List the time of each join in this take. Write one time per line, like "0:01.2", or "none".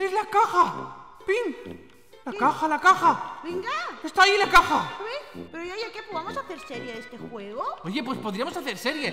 0:05.4